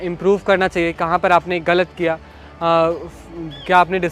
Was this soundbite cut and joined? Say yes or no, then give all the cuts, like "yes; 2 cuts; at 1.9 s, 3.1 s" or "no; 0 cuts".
no; 0 cuts